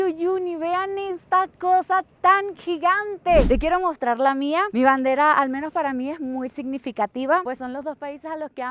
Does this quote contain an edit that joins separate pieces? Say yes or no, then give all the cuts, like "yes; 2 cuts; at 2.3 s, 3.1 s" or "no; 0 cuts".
yes; 2 cuts; at 3.5 s, 7.4 s